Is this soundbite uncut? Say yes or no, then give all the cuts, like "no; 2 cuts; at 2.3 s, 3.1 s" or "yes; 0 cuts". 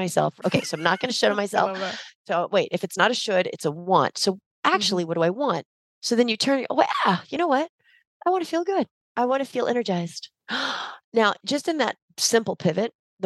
no; 2 cuts; at 9.0 s, 12.1 s